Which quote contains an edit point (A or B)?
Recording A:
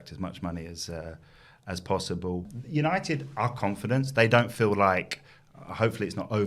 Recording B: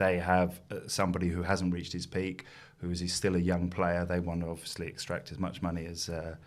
A